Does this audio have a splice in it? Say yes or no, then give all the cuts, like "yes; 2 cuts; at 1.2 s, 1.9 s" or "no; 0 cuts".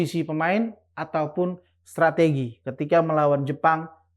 no; 0 cuts